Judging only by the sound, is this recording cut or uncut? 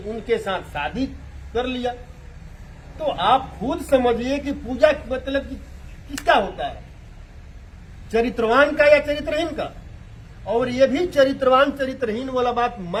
uncut